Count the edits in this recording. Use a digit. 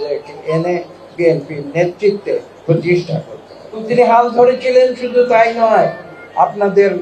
1